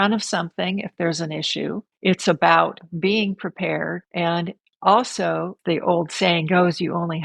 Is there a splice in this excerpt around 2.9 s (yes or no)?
no